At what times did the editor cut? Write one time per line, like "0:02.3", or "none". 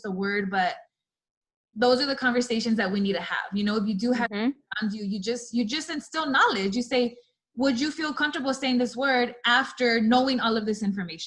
none